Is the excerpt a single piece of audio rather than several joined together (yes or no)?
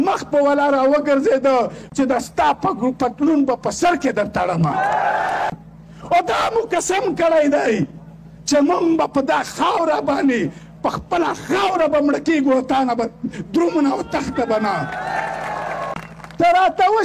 no